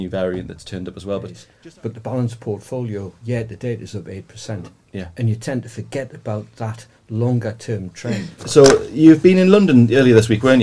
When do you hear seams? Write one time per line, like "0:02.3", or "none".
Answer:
0:01.4
0:08.4